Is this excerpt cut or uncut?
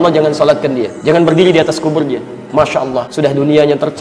cut